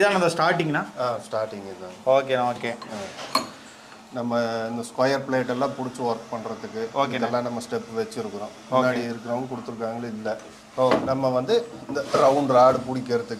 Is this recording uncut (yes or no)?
no